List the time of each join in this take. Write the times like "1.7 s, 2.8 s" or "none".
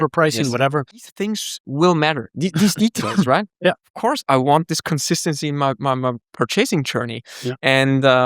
1.2 s, 3.9 s